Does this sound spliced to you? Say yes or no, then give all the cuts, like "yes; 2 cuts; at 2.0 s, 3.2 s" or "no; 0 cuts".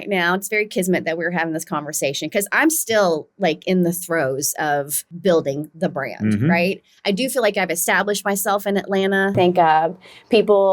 yes; 2 cuts; at 5.0 s, 9.3 s